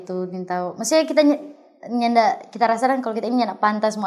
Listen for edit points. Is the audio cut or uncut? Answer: uncut